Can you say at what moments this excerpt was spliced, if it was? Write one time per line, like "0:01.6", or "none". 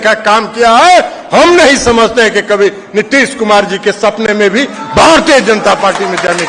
none